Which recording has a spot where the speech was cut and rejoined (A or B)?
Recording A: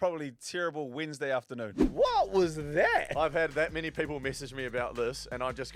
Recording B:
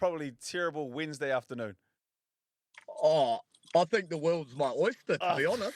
A